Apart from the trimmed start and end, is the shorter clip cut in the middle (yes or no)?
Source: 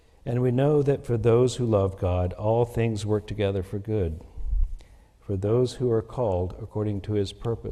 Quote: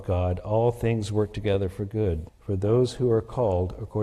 yes